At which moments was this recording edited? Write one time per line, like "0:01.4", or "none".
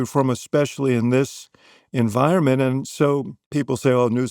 0:03.4